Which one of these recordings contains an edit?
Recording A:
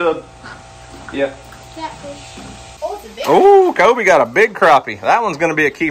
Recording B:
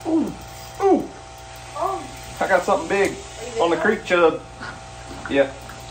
A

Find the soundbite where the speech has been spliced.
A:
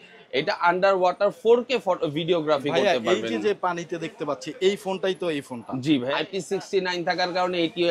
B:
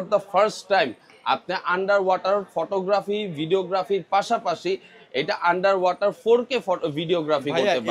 A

